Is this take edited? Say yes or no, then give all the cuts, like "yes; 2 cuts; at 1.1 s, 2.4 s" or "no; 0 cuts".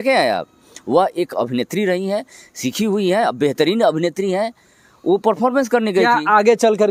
no; 0 cuts